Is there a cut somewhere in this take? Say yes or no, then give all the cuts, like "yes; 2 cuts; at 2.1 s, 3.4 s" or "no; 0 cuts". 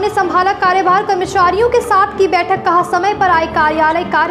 no; 0 cuts